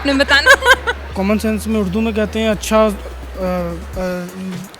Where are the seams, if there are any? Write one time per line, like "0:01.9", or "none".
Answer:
0:01.1